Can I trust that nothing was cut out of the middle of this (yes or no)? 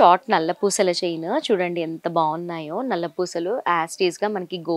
yes